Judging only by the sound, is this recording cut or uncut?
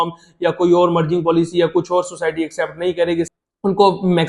cut